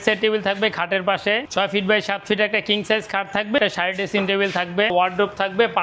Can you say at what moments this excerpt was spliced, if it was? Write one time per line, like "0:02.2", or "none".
0:01.5
0:03.6
0:04.9